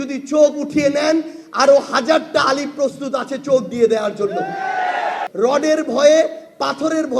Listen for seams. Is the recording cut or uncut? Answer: cut